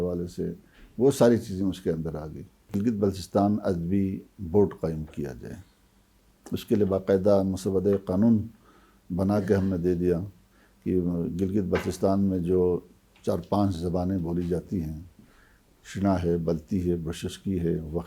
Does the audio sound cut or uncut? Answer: cut